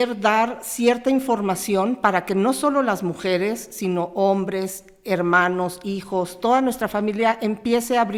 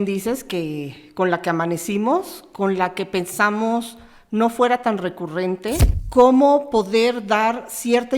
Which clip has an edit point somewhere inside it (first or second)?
second